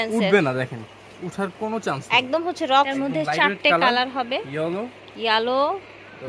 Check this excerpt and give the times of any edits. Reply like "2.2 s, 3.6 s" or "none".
2.9 s